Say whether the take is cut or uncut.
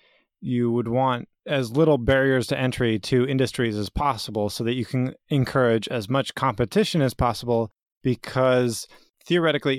uncut